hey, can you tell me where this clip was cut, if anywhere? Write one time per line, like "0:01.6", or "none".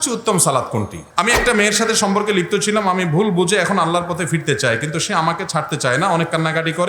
0:01.0

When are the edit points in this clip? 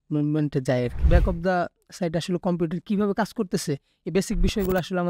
0:01.0

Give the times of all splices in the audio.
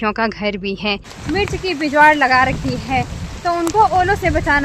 0:01.1

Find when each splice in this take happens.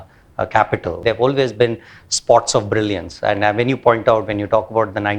0:01.0

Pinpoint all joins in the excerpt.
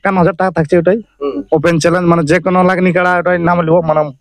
none

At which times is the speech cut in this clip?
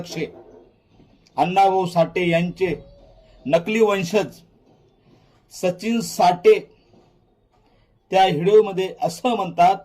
none

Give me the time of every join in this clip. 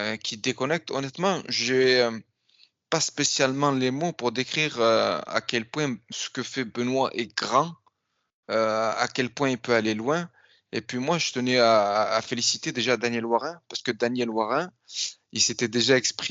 none

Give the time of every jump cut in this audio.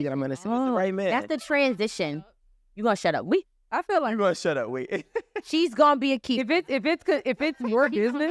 none

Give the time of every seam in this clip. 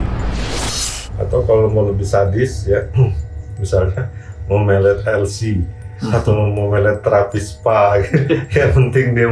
0:01.0

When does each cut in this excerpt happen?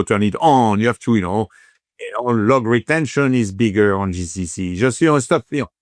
none

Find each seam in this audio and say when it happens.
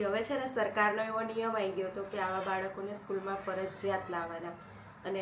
none

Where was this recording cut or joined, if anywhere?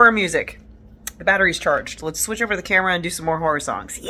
none

